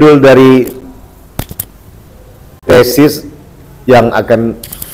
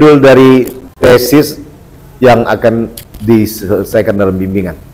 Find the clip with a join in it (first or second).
second